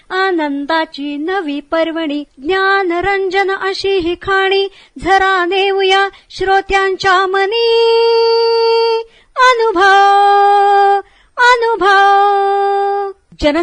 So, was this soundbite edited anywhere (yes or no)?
no